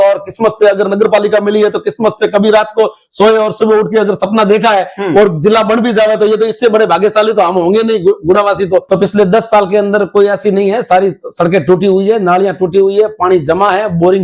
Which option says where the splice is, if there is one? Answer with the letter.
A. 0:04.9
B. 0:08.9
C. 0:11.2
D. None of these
B